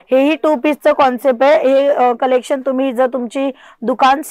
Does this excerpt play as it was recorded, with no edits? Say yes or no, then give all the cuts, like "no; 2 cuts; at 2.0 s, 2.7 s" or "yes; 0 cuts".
yes; 0 cuts